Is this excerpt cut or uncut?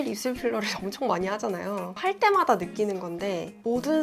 cut